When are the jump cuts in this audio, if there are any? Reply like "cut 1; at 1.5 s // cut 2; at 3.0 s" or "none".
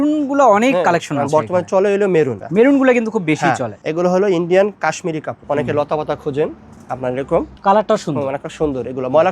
cut 1; at 2.4 s // cut 2; at 5.4 s